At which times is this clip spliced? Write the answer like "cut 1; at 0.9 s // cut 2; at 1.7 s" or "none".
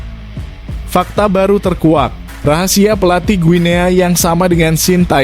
cut 1; at 0.9 s